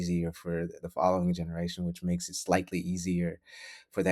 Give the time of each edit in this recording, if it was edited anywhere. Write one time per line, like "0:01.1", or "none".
none